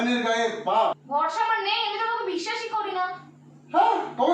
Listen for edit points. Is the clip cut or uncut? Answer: cut